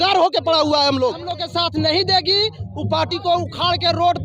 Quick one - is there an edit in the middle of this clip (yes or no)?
yes